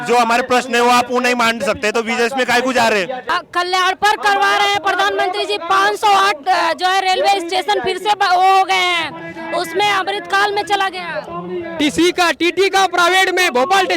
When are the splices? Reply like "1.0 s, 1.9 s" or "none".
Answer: none